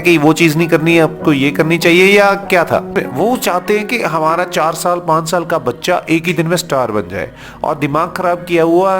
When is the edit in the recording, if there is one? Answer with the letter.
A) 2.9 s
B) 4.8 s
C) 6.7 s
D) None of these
A